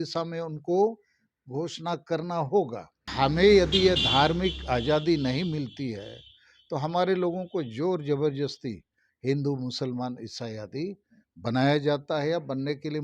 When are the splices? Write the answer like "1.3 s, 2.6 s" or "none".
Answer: 3.0 s